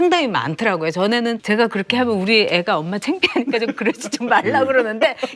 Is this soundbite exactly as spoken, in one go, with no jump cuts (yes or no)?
yes